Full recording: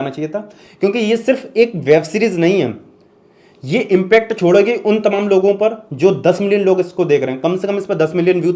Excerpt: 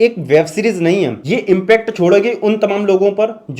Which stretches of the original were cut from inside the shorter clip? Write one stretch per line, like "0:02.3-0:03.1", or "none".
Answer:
0:02.8-0:03.6